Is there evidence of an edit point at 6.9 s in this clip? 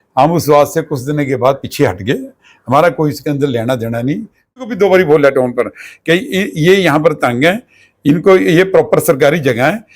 no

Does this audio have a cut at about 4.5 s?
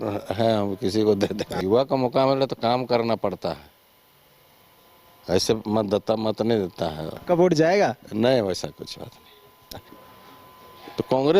no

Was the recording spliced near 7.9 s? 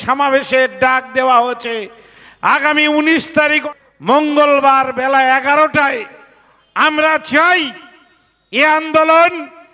no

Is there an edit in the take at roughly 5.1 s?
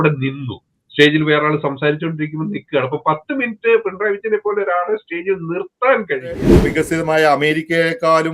no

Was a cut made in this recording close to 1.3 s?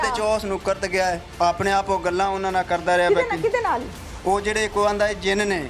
yes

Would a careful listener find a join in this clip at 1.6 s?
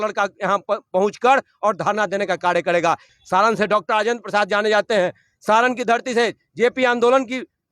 no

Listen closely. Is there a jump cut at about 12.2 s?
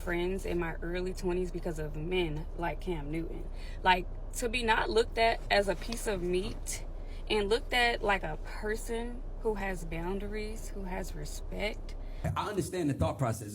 yes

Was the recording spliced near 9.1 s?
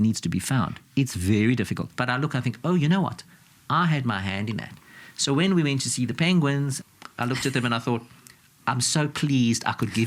no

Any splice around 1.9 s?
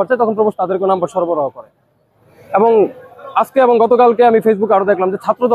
no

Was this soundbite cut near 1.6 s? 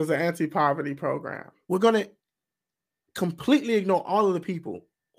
yes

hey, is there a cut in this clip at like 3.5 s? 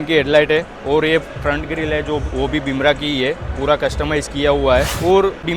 no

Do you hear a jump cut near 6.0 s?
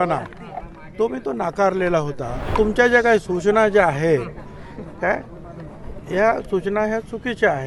no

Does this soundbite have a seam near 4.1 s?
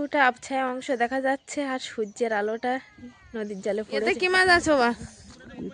yes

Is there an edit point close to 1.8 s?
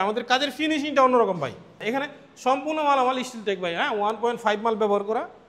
yes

